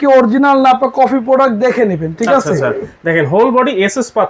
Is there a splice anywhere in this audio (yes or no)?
no